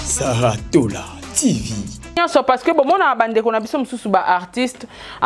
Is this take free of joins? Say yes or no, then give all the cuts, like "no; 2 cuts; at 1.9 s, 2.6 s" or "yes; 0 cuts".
no; 1 cut; at 2.2 s